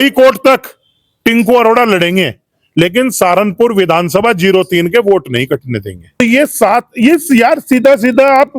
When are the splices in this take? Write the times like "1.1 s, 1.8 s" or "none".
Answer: 6.2 s